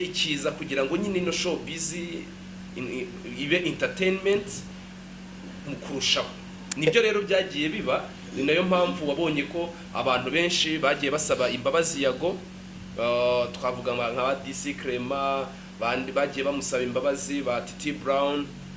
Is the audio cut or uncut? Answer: uncut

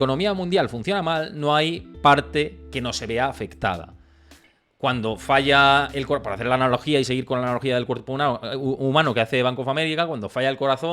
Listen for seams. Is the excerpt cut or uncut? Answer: uncut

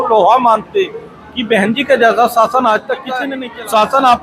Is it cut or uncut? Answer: cut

